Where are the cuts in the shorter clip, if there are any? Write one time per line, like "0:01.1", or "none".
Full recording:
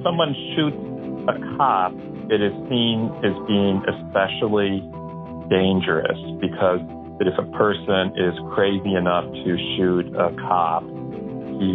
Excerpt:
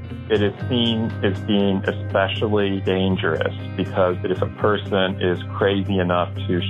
0:02.8
0:04.2

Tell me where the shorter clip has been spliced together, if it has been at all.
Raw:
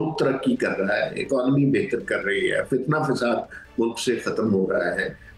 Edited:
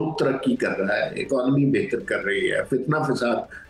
none

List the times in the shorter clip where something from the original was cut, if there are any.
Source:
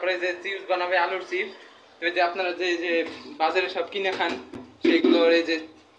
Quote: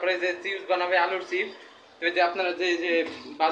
none

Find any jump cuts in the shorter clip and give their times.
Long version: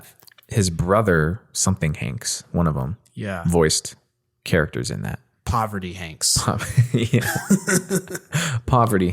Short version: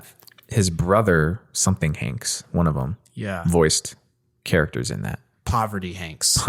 none

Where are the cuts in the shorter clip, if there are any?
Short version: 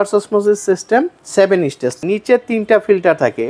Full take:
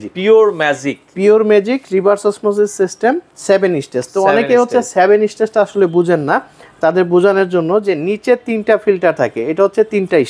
0:02.0

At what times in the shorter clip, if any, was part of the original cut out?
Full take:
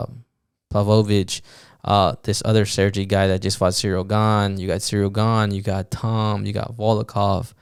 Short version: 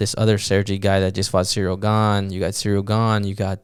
none

